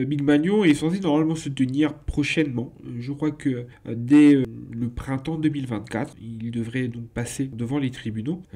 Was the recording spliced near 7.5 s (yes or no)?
yes